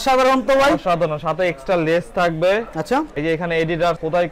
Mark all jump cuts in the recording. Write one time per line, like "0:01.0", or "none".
none

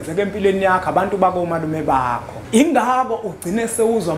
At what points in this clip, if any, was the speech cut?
0:02.3

